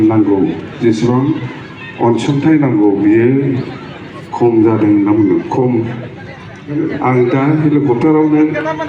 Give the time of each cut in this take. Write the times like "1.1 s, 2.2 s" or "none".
6.8 s

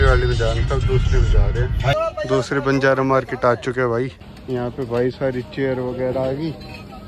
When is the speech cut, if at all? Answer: 1.9 s, 4.3 s

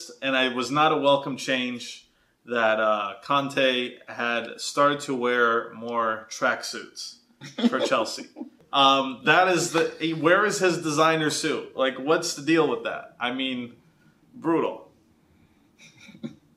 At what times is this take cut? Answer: 8.6 s

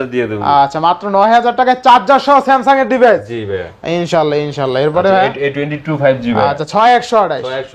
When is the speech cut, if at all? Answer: none

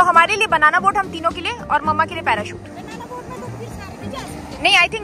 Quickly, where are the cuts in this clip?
none

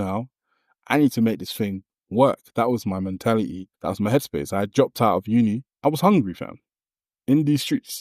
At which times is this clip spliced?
3.7 s, 5.7 s

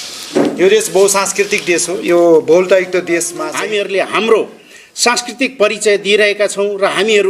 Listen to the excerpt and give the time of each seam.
3.4 s

